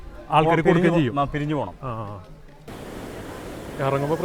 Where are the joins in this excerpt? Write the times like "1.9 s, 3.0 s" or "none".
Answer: 2.7 s